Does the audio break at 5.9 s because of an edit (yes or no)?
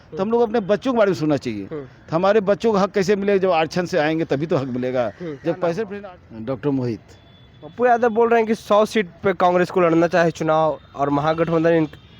yes